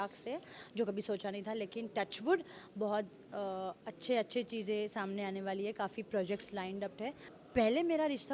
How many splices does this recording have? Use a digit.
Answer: 1